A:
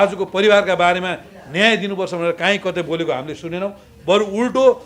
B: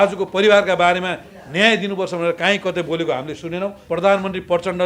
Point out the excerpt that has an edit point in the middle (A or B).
B